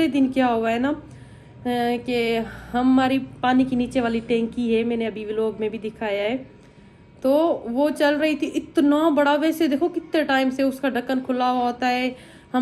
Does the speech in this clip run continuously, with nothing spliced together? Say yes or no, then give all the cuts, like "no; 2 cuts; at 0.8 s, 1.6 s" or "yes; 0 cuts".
yes; 0 cuts